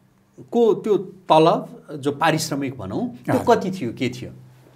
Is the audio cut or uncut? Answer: uncut